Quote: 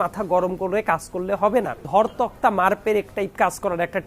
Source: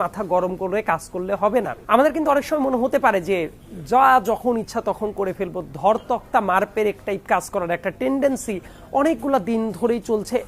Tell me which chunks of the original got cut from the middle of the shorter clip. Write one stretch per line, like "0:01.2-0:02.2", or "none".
0:01.8-0:05.7